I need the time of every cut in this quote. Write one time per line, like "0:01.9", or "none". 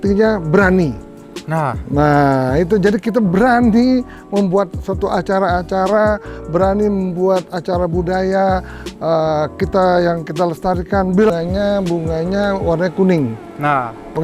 0:11.3